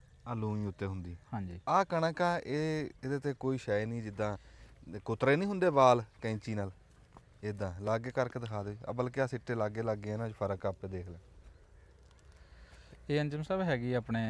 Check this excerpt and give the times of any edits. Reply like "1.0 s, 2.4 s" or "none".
none